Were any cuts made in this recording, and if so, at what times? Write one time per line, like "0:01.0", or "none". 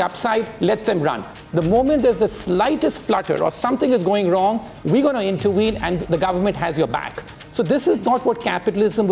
0:06.0